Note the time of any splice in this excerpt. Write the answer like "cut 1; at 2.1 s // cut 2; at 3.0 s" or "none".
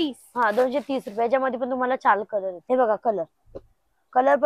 cut 1; at 2.6 s